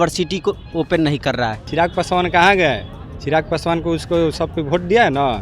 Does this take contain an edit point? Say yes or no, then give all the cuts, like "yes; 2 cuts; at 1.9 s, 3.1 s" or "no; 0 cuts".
yes; 1 cut; at 1.6 s